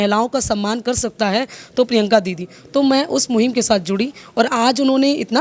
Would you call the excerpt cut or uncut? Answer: uncut